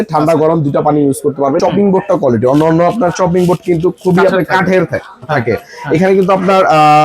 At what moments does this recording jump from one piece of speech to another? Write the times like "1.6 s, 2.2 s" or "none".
1.6 s